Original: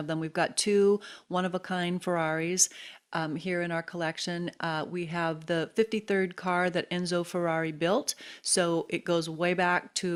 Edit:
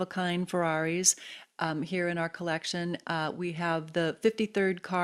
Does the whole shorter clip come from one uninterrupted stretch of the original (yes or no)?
yes